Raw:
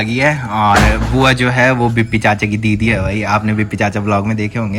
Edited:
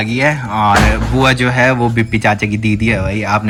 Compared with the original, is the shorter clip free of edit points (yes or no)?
yes